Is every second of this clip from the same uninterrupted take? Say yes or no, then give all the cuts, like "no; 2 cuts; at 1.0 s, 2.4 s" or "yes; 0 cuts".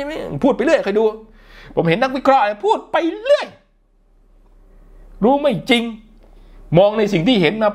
yes; 0 cuts